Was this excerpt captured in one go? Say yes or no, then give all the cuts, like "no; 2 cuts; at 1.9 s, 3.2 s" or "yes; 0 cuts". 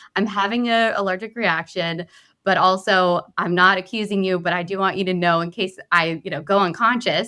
yes; 0 cuts